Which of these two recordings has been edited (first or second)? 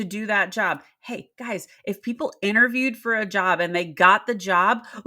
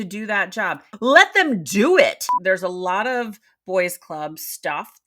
second